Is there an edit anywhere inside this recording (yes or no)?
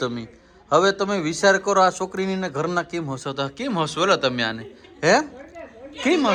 no